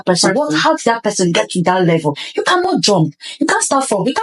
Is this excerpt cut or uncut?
uncut